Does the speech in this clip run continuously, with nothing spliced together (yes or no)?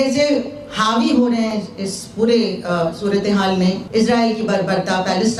no